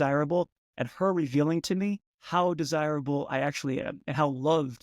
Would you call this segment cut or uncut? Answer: cut